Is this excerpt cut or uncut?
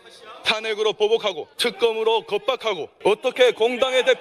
cut